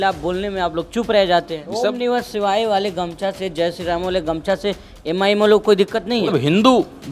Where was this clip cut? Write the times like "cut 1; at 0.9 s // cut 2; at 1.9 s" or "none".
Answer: cut 1; at 1.7 s // cut 2; at 6.3 s